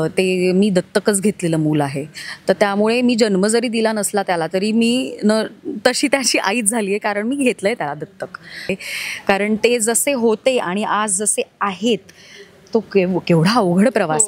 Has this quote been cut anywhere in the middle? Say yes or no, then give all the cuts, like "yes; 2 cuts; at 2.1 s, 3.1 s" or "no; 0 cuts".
yes; 1 cut; at 8.7 s